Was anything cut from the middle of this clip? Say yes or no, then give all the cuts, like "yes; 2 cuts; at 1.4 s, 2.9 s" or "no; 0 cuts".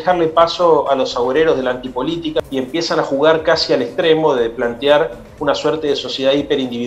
yes; 1 cut; at 2.4 s